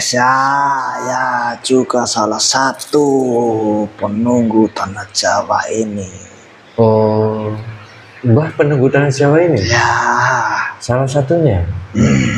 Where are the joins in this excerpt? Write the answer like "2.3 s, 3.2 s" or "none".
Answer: 0.9 s